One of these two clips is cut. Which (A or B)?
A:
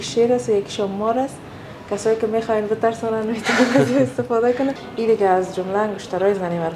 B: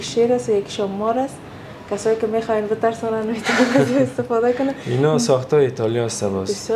A